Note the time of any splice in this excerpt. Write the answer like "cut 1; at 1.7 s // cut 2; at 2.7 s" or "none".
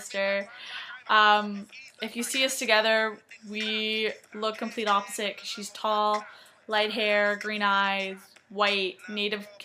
none